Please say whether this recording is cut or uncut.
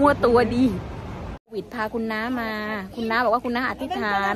cut